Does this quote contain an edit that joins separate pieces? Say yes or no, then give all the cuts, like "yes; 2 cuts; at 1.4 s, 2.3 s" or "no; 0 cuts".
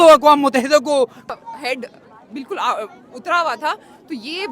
yes; 1 cut; at 1.3 s